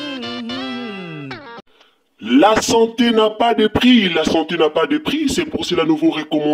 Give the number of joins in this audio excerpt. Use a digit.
1